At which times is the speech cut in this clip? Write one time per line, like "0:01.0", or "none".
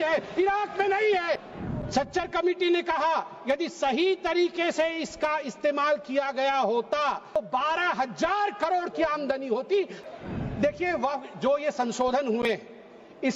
0:01.5
0:07.4
0:10.0